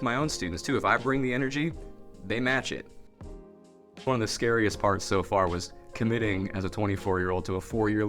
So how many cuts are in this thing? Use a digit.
1